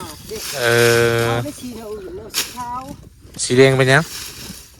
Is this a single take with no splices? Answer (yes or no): yes